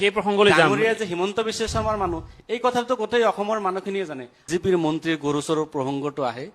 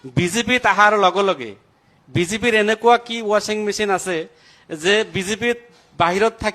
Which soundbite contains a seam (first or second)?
first